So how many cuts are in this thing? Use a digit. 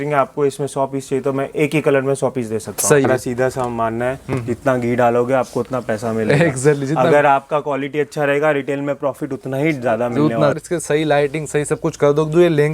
2